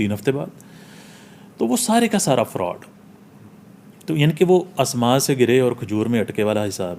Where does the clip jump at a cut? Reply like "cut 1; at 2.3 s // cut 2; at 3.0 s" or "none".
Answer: none